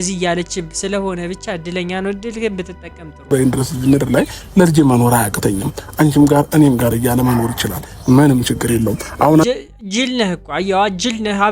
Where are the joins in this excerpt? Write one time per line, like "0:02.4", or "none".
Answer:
0:03.2